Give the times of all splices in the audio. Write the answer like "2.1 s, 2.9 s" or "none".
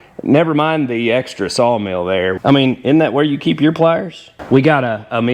2.4 s, 4.3 s